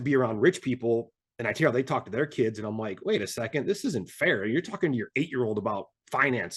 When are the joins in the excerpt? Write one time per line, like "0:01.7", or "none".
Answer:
none

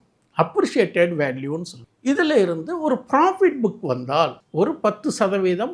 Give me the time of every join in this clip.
0:04.4

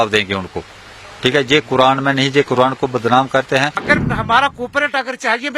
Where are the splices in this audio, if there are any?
0:03.8

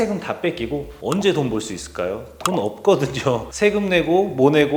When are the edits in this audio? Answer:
0:00.9
0:03.5

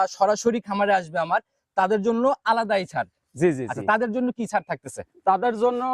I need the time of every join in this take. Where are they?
none

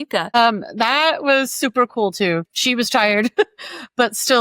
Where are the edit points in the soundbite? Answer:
0:02.4

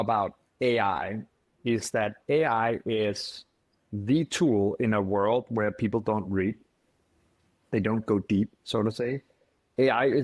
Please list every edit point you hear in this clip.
none

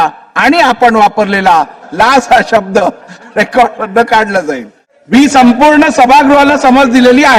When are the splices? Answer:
none

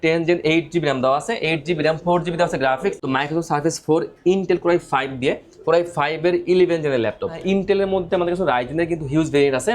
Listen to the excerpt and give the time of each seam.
0:03.0
0:07.3

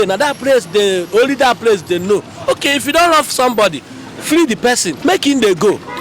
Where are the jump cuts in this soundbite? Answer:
0:04.9

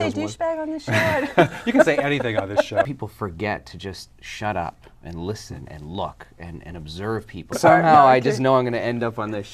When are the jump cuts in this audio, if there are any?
0:02.9
0:07.6

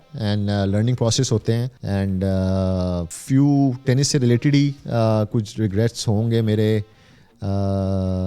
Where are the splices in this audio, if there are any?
0:01.7
0:03.1

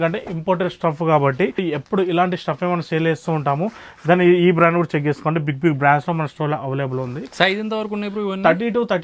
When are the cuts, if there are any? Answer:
none

